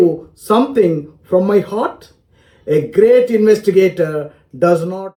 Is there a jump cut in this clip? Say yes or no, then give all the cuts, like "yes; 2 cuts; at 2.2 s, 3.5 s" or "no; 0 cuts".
no; 0 cuts